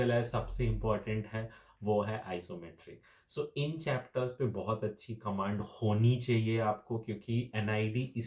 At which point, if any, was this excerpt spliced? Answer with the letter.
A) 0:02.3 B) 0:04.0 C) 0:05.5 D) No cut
D